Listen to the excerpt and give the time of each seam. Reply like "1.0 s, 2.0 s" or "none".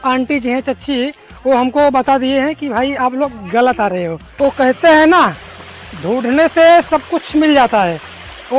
4.3 s